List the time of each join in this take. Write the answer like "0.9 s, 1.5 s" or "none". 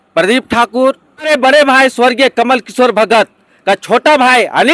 1.3 s